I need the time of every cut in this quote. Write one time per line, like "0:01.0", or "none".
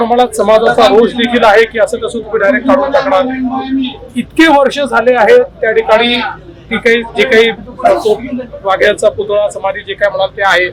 none